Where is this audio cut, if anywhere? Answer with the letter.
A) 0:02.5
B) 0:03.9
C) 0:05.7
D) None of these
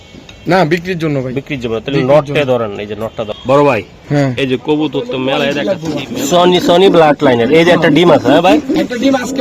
C